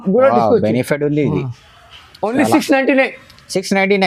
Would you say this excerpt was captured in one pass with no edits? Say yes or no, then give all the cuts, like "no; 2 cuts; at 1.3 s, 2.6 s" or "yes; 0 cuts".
yes; 0 cuts